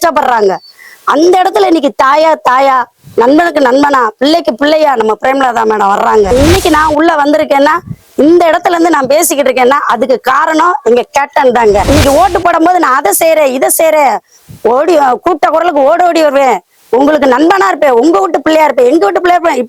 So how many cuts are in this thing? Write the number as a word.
two